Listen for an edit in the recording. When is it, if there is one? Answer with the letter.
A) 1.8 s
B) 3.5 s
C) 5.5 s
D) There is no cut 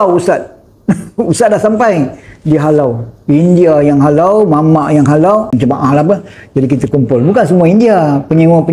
C